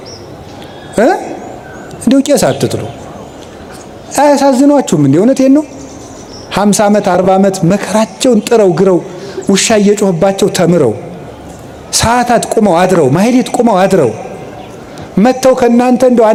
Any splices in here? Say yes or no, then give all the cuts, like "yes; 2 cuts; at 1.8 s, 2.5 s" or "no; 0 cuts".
no; 0 cuts